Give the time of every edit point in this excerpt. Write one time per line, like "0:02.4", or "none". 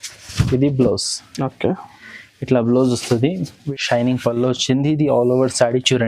0:03.5